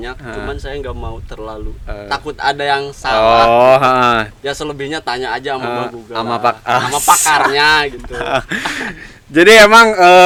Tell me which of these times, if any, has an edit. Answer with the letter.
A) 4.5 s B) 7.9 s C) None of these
C